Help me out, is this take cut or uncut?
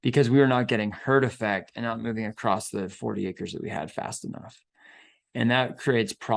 uncut